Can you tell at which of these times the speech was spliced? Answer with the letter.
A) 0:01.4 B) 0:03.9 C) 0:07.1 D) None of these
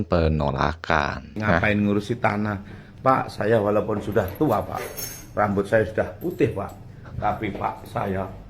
A